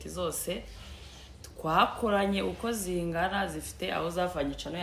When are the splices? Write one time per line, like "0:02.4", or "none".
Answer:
none